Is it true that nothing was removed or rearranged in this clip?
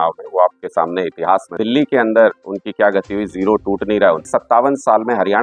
no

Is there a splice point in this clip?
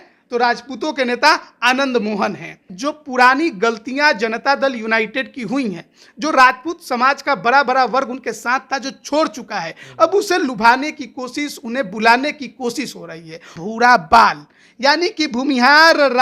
yes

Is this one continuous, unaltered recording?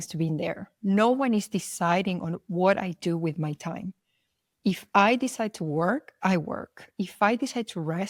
yes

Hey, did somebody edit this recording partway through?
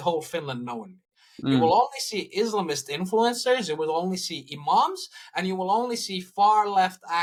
no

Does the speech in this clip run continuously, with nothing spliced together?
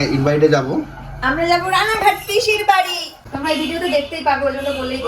no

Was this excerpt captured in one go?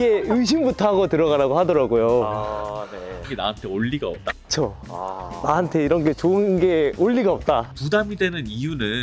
no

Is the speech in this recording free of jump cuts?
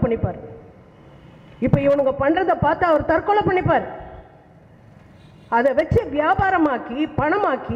yes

